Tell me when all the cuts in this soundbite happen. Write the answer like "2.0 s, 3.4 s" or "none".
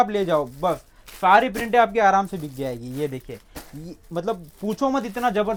none